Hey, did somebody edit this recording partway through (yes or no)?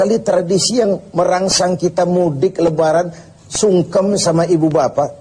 no